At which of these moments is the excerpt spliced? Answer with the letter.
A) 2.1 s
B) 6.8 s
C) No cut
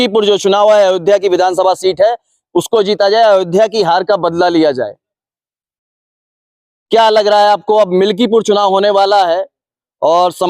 C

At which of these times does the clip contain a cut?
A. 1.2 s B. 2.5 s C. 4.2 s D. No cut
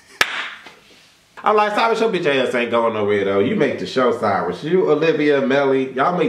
A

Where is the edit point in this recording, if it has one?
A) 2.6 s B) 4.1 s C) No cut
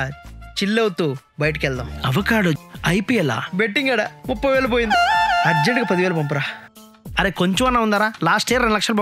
A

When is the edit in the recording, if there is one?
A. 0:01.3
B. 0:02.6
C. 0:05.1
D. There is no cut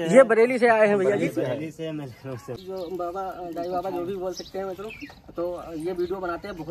B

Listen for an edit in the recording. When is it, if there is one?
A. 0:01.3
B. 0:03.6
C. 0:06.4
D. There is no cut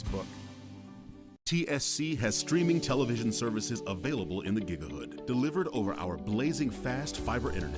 A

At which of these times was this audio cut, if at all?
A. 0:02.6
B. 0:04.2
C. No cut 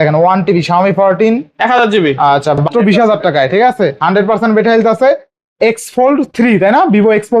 A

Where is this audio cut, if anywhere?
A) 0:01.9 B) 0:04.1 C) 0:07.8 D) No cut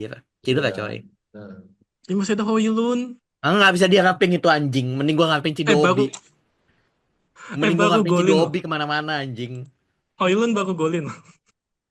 D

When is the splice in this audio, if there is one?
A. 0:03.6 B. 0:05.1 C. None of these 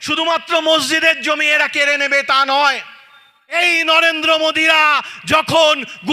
A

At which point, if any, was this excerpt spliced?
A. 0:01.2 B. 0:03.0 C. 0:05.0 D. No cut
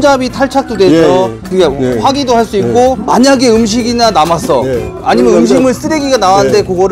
B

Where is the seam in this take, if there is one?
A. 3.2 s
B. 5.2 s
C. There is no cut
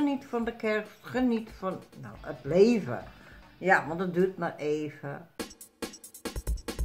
B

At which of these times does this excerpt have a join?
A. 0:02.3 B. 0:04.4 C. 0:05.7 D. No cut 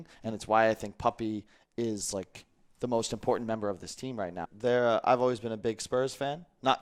B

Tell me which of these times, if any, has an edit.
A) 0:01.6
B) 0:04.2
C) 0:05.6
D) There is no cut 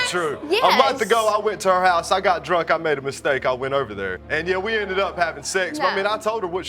B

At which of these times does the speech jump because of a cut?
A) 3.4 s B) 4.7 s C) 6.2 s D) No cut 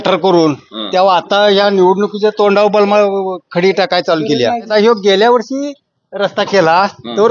B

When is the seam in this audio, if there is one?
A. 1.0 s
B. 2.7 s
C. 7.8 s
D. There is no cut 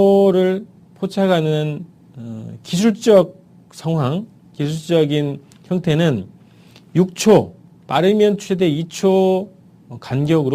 A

